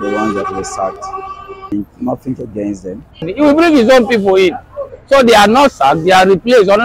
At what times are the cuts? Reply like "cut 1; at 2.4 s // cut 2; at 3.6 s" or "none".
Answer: cut 1; at 1.7 s // cut 2; at 3.3 s